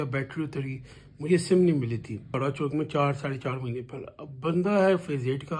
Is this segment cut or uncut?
cut